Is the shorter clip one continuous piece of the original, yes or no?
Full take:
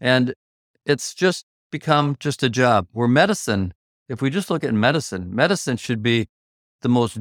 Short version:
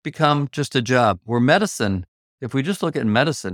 yes